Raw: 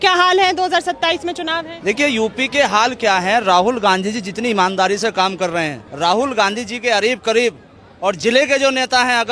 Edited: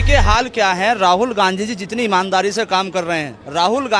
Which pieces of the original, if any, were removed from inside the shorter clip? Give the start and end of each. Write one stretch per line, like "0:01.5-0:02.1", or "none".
none